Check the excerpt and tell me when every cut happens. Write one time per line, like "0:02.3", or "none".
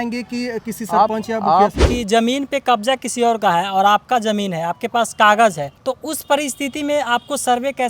0:01.9